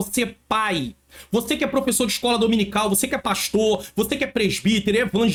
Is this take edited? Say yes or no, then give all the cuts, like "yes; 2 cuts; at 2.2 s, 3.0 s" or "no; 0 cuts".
no; 0 cuts